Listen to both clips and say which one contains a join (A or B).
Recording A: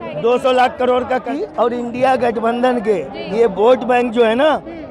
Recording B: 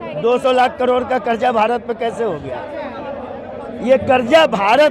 A